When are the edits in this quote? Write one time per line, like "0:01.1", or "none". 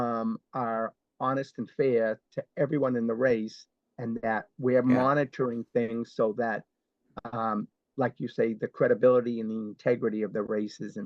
none